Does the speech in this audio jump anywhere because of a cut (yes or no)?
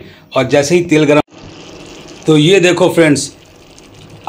yes